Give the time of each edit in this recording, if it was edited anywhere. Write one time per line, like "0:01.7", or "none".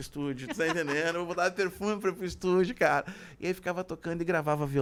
none

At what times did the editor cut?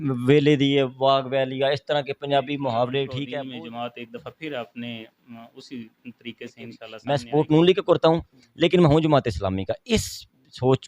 0:03.2
0:06.9

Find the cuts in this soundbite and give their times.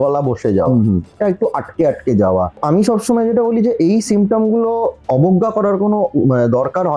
0:01.1
0:02.6

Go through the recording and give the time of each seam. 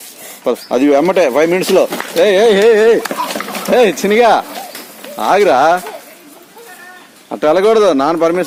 none

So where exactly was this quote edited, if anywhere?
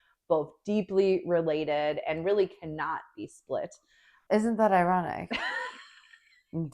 0:04.2

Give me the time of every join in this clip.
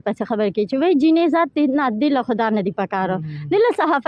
none

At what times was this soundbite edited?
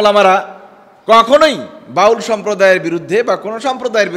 none

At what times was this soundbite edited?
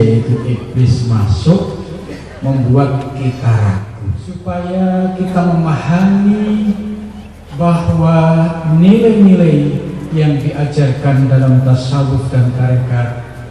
0:04.4

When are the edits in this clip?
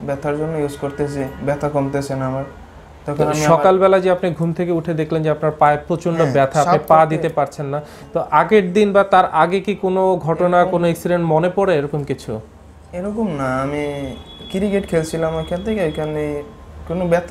none

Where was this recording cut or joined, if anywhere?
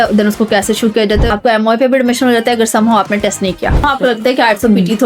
0:01.3
0:03.9

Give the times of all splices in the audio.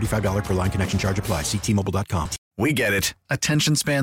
0:02.4

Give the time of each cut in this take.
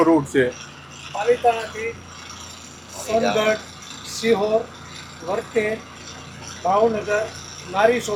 none

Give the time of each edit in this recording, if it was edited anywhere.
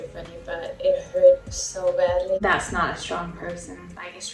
0:02.4

